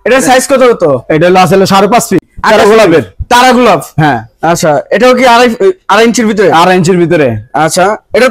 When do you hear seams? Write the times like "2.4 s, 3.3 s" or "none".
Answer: 2.3 s